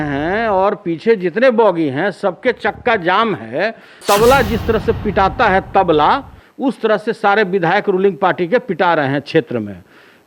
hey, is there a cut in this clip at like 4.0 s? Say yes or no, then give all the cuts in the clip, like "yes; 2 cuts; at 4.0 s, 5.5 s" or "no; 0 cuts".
yes; 1 cut; at 4.0 s